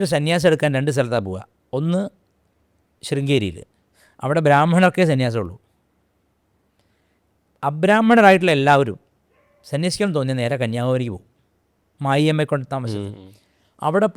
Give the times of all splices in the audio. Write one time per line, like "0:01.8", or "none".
none